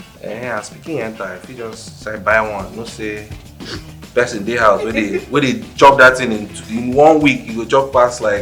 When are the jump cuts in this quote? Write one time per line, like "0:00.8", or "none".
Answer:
none